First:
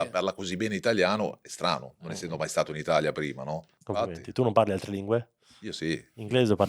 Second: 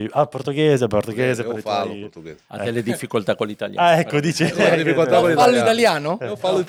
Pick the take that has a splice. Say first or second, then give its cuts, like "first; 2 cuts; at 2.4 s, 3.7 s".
first; 1 cut; at 3.7 s